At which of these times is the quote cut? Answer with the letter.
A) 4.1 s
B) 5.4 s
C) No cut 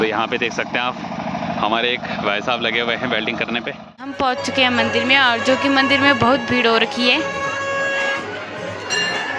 A